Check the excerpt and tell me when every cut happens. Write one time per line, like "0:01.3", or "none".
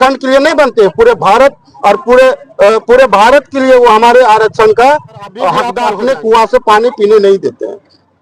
0:05.7

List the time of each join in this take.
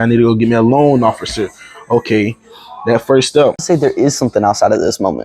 0:03.6

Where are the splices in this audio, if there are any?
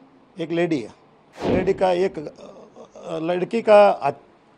0:01.5

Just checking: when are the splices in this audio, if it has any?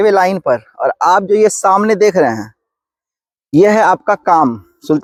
none

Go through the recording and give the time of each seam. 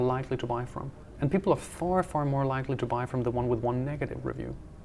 0:01.0

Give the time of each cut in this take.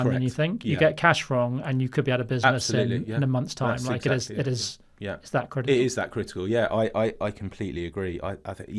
none

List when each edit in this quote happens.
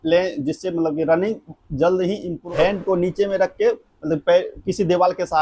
0:02.4

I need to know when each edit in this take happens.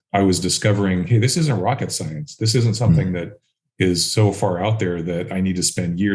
none

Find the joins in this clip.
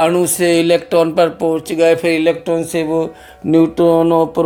none

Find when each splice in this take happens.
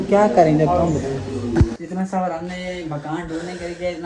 0:01.4

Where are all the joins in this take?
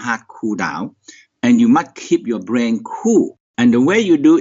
0:03.4

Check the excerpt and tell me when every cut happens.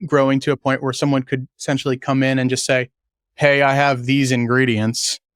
none

